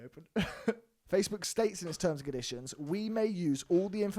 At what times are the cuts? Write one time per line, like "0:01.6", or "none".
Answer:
0:00.9